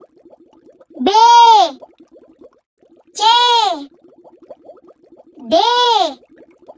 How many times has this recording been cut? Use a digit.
2